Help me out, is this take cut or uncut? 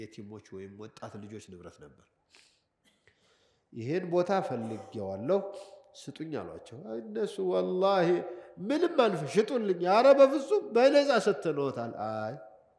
uncut